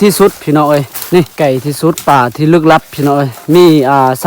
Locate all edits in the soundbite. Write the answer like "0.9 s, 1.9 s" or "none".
1.3 s